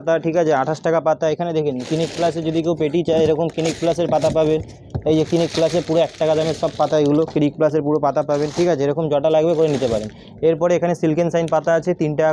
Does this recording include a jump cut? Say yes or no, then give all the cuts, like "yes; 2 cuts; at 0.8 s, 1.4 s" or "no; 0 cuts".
no; 0 cuts